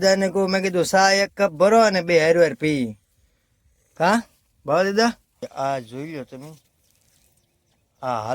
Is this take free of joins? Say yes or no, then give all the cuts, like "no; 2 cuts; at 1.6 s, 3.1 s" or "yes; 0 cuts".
no; 1 cut; at 5.5 s